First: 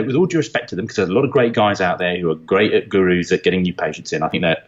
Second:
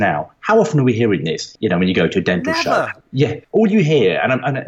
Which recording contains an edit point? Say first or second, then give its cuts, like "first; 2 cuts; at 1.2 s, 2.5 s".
second; 2 cuts; at 1.5 s, 2.9 s